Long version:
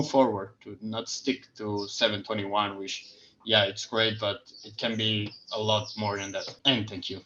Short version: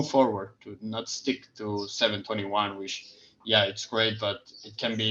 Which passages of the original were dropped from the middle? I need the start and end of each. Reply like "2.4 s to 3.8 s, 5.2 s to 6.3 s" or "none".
none